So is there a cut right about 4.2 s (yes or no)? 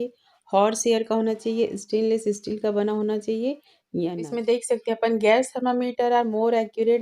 yes